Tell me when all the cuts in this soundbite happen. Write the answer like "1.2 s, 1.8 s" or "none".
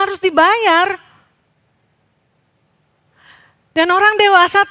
none

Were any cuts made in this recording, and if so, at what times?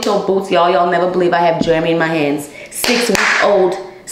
none

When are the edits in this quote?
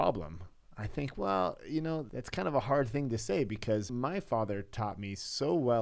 2.2 s, 3.9 s

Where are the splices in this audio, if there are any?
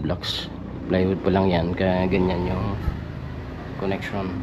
none

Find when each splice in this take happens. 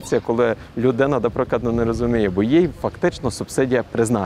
none

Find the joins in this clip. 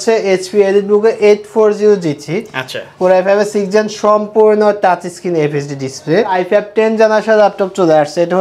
6.3 s

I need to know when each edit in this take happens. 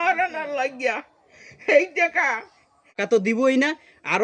3.0 s

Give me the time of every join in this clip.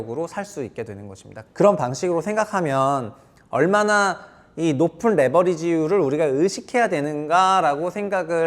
1.3 s

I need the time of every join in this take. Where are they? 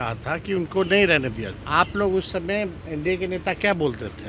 1.5 s

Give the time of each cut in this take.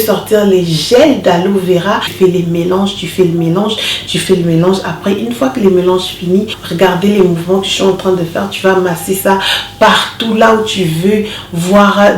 2.1 s, 6.6 s

